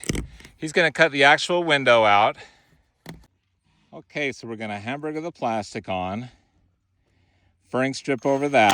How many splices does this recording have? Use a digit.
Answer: 1